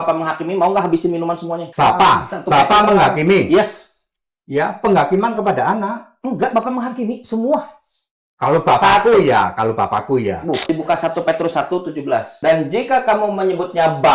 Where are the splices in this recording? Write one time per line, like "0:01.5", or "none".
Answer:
0:01.6
0:10.6
0:12.3